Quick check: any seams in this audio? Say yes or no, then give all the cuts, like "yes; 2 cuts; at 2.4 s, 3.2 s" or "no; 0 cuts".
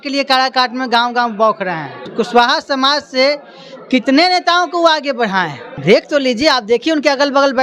yes; 2 cuts; at 2.0 s, 5.6 s